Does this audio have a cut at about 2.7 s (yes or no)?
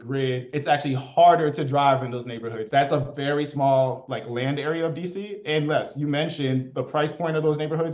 yes